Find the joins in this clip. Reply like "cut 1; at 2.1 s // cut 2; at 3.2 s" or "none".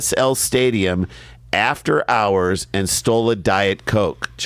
none